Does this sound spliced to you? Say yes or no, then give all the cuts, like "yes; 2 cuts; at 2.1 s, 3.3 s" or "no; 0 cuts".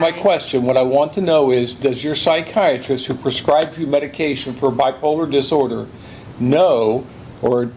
no; 0 cuts